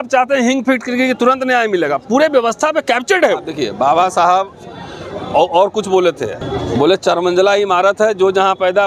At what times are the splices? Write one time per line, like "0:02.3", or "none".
0:03.6
0:06.4